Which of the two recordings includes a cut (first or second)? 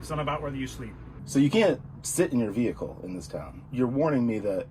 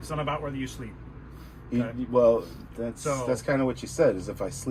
first